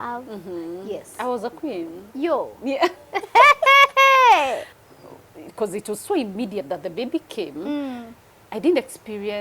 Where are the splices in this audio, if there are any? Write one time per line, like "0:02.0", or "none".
0:04.8